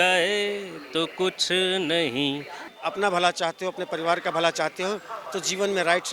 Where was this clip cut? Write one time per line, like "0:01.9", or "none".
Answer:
0:02.7